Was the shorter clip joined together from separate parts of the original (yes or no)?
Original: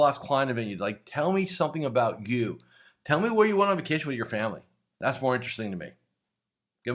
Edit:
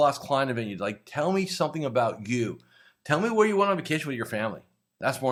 no